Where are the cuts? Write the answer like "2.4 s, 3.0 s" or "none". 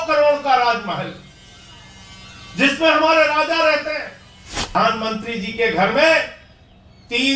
4.7 s